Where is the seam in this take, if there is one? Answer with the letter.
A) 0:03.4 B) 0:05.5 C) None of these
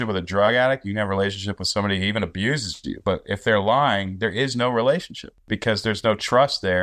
B